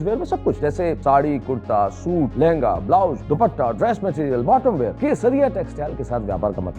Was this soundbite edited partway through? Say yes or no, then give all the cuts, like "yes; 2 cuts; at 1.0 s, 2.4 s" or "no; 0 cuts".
yes; 4 cuts; at 0.7 s, 2.3 s, 3.2 s, 4.9 s